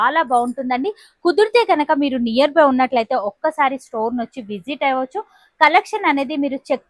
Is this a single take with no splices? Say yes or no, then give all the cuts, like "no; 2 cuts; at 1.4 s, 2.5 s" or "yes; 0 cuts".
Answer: yes; 0 cuts